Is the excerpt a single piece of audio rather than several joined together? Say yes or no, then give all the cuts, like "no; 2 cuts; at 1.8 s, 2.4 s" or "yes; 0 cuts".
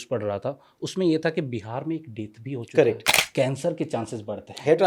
no; 1 cut; at 3.2 s